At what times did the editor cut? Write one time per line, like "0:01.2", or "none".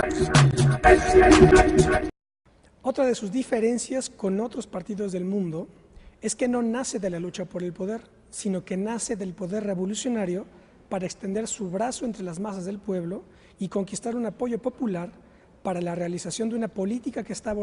none